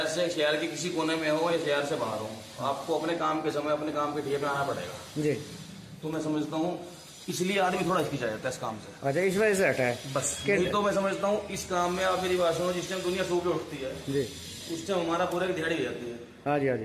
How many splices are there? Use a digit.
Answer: 0